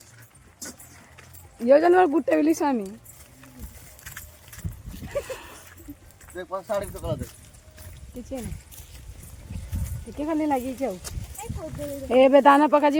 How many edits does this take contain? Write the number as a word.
zero